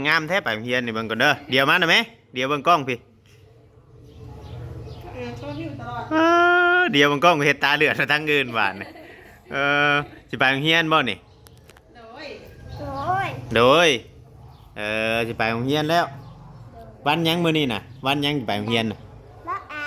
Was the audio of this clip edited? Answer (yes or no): no